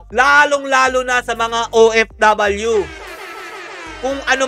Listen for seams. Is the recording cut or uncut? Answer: uncut